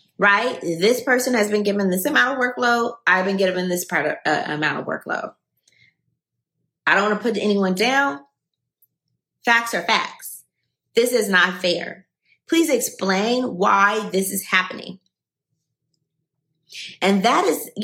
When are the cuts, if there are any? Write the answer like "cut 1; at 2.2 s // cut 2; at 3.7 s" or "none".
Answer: none